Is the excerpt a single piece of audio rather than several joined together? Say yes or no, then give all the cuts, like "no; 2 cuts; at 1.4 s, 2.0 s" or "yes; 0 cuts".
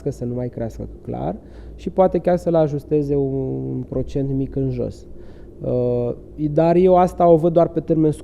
yes; 0 cuts